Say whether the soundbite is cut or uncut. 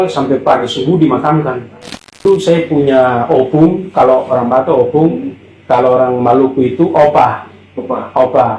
cut